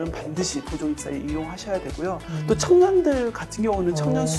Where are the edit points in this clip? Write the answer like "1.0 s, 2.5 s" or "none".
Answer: none